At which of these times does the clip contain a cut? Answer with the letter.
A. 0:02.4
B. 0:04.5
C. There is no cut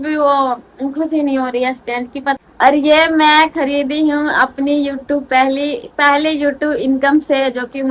A